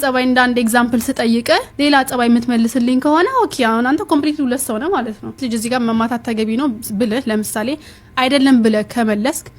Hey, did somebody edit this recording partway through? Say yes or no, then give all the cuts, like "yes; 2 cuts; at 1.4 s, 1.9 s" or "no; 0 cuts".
yes; 1 cut; at 5.4 s